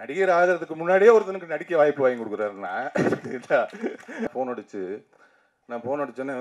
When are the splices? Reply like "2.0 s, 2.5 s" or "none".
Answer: 4.3 s